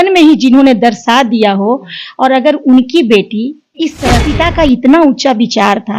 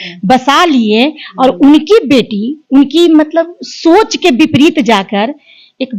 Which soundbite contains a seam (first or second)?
first